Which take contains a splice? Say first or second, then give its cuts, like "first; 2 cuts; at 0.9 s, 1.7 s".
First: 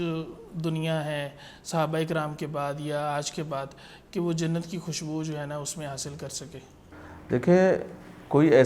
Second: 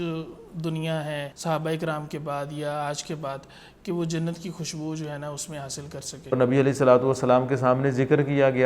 second; 2 cuts; at 1.3 s, 6.3 s